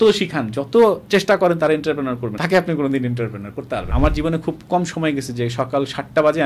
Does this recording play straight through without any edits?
no; 2 cuts; at 2.3 s, 3.9 s

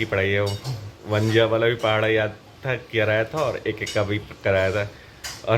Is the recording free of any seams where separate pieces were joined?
yes; 0 cuts

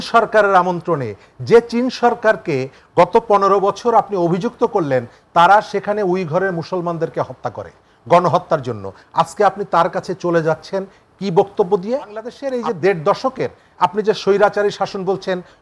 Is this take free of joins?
no; 1 cut; at 12.4 s

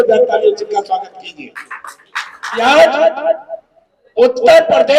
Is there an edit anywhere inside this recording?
yes; 1 cut; at 2.6 s

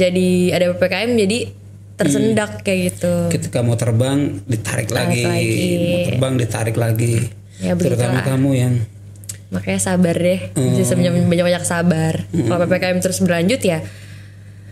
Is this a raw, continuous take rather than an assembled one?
yes; 0 cuts

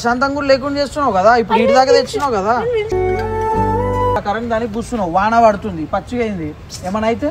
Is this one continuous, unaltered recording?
no; 1 cut; at 4.2 s

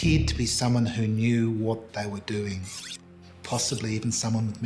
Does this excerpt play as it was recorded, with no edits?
no; 1 cut; at 3.0 s

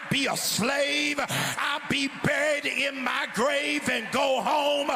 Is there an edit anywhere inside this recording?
no; 0 cuts

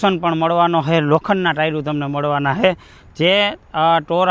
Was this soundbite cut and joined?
no; 0 cuts

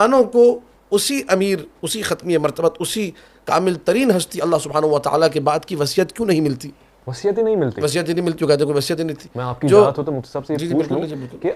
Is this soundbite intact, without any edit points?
yes; 0 cuts

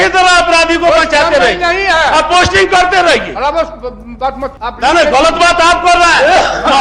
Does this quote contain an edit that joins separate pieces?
yes; 1 cut; at 4.6 s

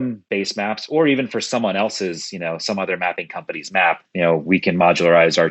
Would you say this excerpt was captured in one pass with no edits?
no; 1 cut; at 4.1 s

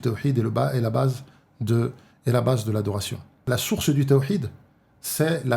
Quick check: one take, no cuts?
no; 1 cut; at 3.4 s

